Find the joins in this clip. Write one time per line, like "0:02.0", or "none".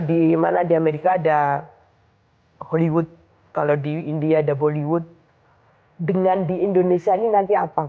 none